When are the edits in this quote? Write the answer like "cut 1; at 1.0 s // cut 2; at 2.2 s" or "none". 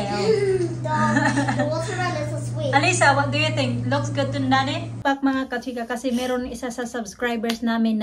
cut 1; at 5.0 s